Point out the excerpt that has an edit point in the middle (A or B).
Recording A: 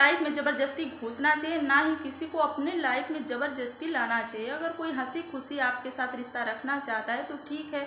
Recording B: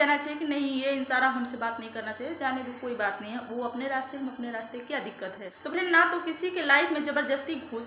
B